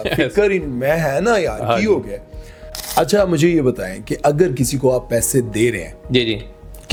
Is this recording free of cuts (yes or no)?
yes